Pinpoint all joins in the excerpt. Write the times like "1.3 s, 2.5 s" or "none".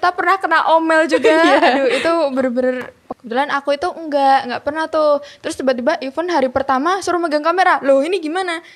3.0 s